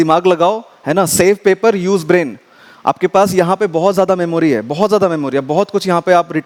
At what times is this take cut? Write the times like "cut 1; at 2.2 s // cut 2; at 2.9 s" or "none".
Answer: none